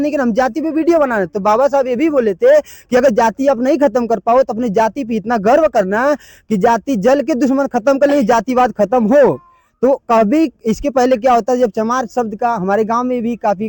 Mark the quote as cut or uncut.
uncut